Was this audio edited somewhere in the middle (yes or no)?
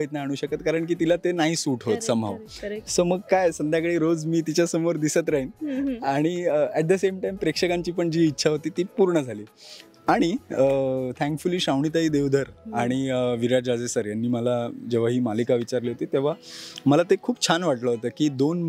no